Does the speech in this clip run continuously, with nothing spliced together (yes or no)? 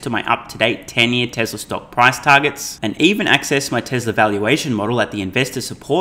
yes